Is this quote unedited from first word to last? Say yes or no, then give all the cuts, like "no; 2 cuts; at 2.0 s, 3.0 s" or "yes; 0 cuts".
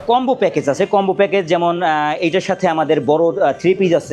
yes; 0 cuts